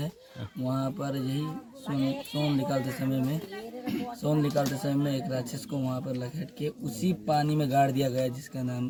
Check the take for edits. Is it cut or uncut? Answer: uncut